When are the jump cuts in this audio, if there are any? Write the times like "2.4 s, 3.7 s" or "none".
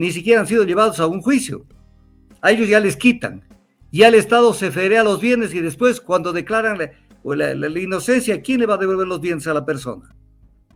none